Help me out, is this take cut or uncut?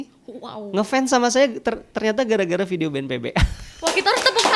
uncut